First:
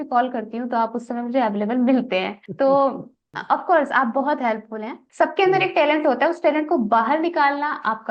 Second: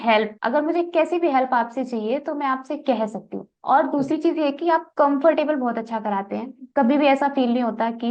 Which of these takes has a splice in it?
first; 1 cut; at 5.0 s

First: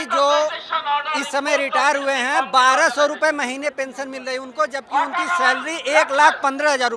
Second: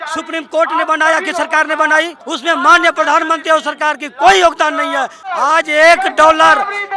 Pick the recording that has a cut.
second; 2 cuts; at 2.2 s, 5.3 s

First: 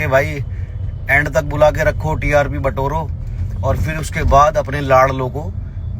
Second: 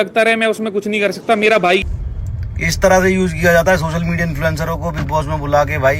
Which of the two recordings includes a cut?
second; 1 cut; at 1.8 s

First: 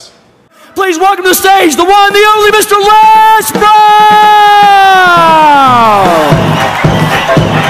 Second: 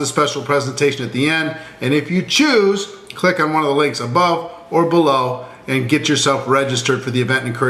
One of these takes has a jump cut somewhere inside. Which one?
second; 1 cut; at 1.0 s

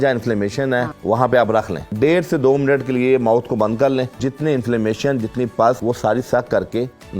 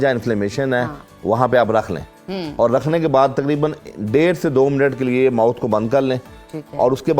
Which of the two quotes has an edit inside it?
first; 4 cuts; at 0.9 s, 1.8 s, 4.3 s, 5.8 s

